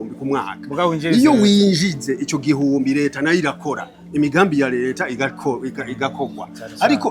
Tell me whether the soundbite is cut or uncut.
uncut